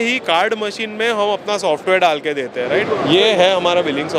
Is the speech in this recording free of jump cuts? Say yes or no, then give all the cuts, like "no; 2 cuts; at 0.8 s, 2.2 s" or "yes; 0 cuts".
no; 1 cut; at 2.8 s